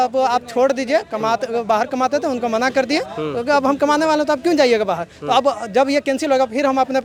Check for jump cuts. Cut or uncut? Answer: uncut